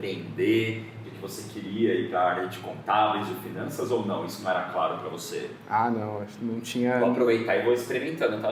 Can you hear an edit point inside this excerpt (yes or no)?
no